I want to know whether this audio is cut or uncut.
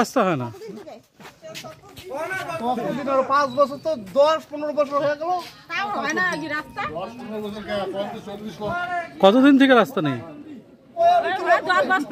cut